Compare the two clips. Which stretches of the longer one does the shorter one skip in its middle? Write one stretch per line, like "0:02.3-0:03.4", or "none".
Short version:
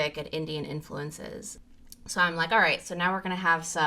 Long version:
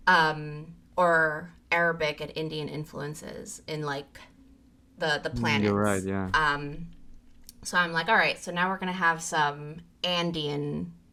0:03.5-0:07.0

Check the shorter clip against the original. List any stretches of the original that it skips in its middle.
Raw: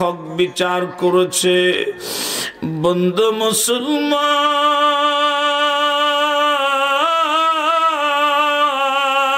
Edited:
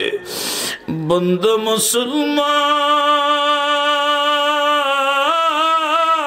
none

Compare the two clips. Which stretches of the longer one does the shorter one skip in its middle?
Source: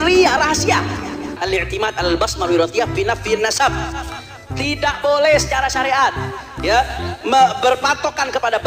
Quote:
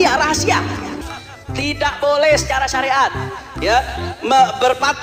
0:01.2-0:04.1

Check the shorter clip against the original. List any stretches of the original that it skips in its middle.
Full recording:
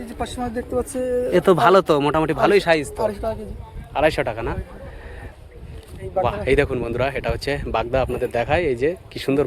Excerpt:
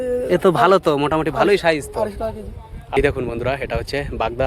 0:04.0-0:06.5

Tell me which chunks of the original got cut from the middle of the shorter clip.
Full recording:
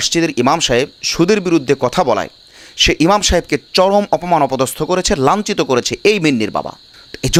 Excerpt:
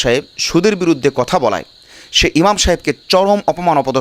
none

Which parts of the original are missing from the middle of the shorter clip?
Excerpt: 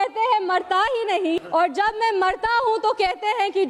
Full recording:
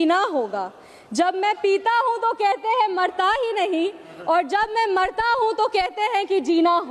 0:03.9-0:04.2

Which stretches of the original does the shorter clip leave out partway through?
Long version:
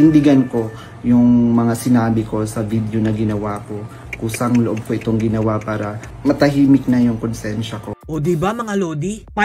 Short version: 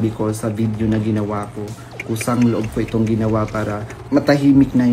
none

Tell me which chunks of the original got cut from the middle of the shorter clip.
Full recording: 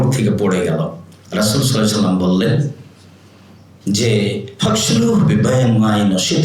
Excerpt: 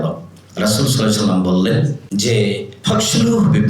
0:02.8-0:03.8

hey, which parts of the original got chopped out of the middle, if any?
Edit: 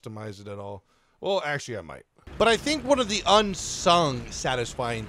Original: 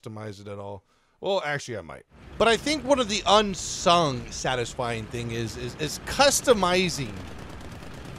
none

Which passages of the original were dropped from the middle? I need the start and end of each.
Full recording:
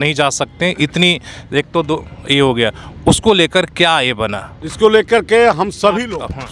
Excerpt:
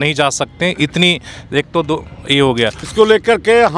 0:02.8-0:04.7

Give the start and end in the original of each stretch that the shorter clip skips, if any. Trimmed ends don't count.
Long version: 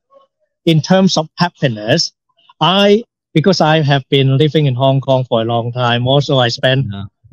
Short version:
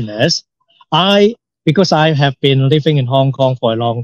none

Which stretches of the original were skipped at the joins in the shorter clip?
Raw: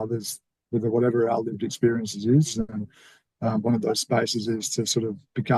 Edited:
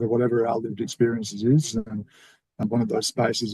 0:03.4-0:03.5

